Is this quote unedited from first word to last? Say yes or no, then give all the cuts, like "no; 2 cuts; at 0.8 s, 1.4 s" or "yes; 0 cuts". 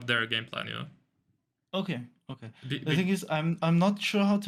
yes; 0 cuts